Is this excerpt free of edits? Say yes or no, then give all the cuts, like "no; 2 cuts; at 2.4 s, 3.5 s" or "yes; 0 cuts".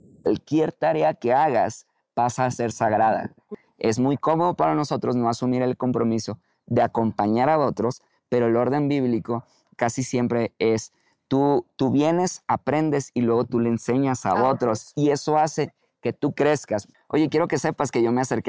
no; 2 cuts; at 3.6 s, 16.9 s